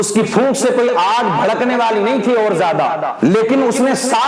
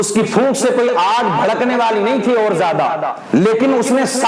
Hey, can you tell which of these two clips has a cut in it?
first; 1 cut; at 3.1 s

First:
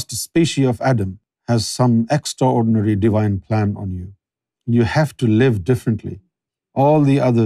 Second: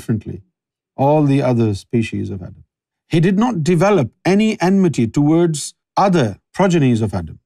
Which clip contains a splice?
second; 1 cut; at 6.1 s

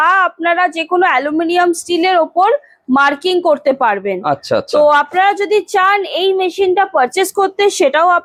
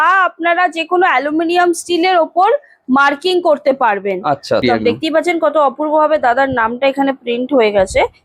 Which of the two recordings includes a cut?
second; 1 cut; at 4.6 s

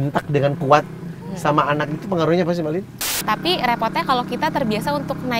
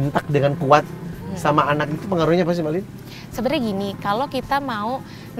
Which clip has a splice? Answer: first; 1 cut; at 3.1 s

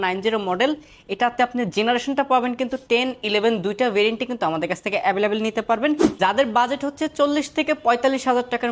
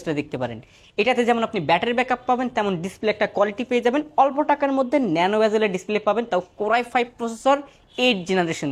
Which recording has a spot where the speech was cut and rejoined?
first; 1 cut; at 6.2 s

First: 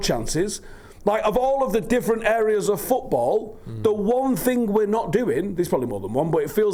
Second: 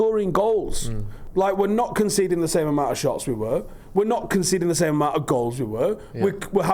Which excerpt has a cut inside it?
second; 1 cut; at 1.2 s

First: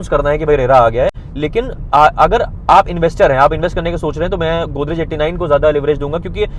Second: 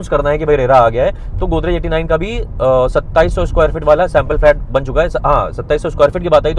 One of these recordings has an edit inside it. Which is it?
first; 1 cut; at 1.2 s

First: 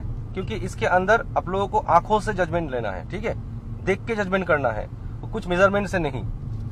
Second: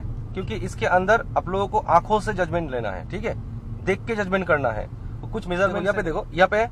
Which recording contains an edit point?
second; 1 cut; at 5.8 s

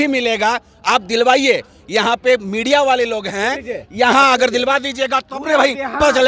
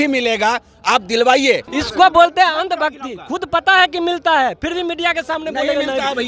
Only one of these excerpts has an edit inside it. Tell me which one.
second; 1 cut; at 1.7 s

